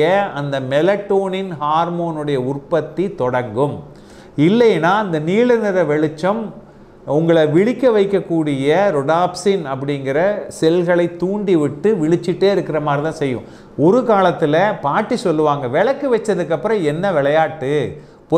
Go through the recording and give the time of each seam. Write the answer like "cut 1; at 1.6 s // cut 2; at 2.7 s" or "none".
cut 1; at 13.5 s